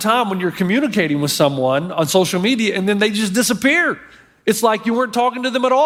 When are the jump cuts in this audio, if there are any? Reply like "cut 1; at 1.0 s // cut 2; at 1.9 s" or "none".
none